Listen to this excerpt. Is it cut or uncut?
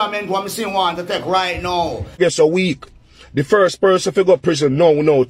cut